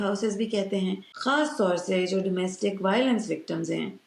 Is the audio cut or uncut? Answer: cut